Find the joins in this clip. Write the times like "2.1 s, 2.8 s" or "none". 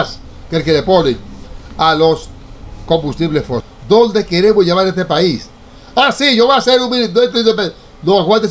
3.7 s

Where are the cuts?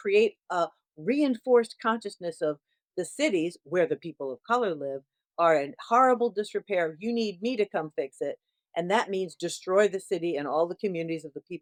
none

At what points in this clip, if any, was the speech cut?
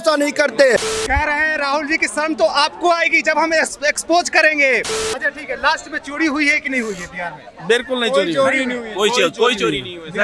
0.9 s, 5.0 s

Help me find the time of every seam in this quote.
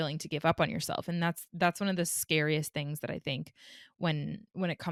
none

